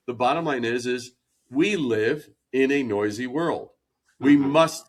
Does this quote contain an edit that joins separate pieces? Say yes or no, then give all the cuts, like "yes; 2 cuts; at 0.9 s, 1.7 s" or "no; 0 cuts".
no; 0 cuts